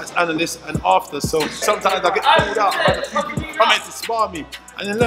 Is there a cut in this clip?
yes; 1 cut; at 1.6 s

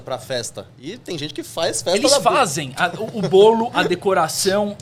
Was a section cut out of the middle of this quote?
no; 0 cuts

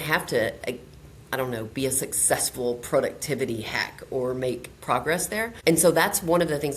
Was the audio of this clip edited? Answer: yes; 1 cut; at 5.5 s

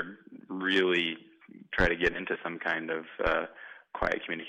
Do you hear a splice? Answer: no; 0 cuts

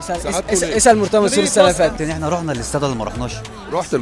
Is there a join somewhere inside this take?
yes; 1 cut; at 2.0 s

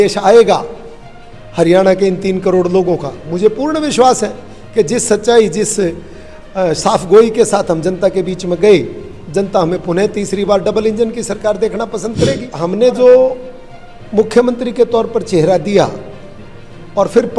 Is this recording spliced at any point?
yes; 1 cut; at 12.5 s

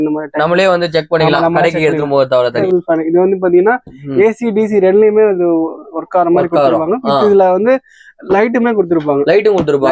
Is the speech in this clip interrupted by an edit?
yes; 1 cut; at 2.6 s

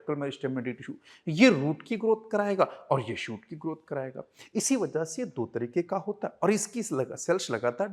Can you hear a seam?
no; 0 cuts

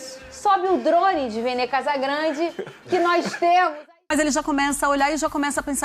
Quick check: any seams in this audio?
yes; 1 cut; at 3.8 s

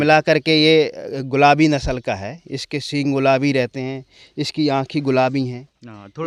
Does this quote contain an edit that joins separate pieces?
no; 0 cuts

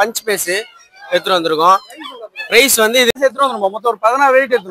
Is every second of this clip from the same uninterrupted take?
no; 1 cut; at 3.1 s

